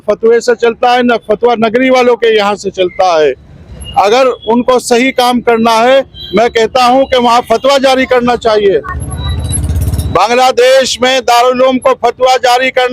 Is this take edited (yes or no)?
no